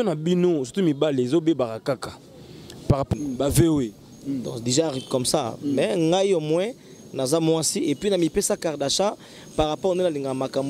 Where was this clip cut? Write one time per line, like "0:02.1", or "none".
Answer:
0:03.1